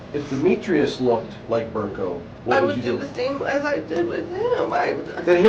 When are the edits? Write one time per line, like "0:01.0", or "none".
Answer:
0:01.3
0:02.3

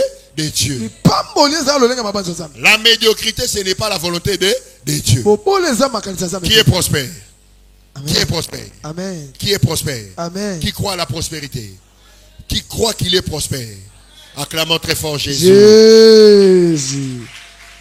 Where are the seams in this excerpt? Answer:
none

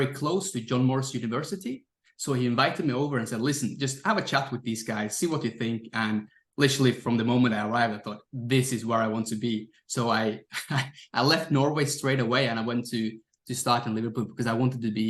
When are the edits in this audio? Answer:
none

